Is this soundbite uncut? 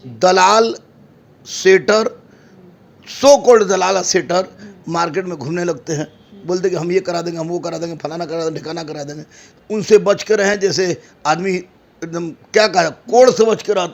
yes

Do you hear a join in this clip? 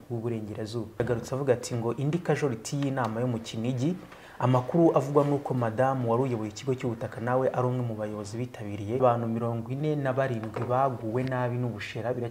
yes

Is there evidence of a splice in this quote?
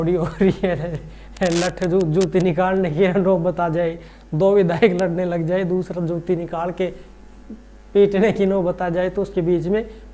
no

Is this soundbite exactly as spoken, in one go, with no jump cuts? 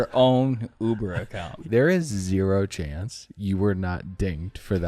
no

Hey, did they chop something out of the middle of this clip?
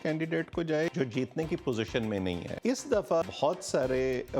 yes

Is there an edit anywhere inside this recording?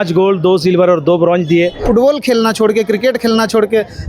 yes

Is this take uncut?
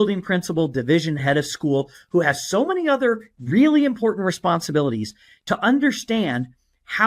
no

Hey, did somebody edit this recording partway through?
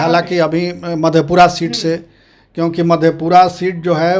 no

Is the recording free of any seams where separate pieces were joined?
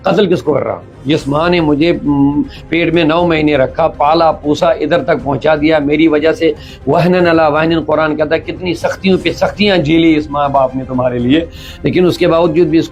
yes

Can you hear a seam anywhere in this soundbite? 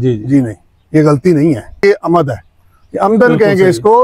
yes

